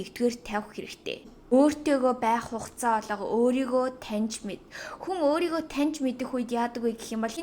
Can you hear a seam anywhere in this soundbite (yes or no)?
yes